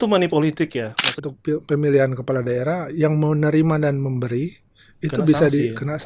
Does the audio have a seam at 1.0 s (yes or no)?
yes